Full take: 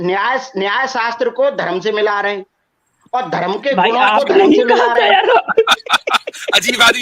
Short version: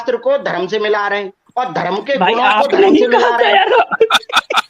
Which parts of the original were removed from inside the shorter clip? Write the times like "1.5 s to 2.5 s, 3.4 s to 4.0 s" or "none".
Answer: 2.5 s to 2.9 s